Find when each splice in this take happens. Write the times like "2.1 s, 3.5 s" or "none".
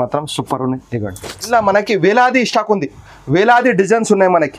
1.5 s